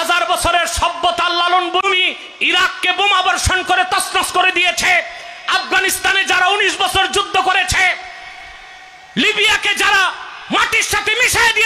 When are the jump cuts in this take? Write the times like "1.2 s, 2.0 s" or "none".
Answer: 1.8 s